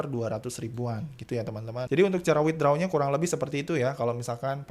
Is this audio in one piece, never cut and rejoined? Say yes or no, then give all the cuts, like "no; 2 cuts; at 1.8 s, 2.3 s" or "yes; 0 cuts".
no; 1 cut; at 1.9 s